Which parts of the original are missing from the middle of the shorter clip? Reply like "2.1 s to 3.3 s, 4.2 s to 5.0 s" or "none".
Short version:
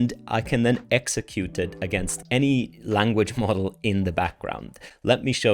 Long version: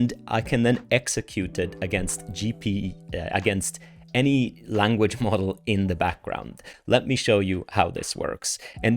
2.2 s to 4.0 s